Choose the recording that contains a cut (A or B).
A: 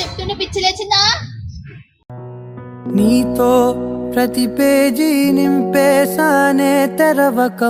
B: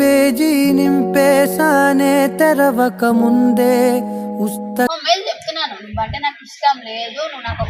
B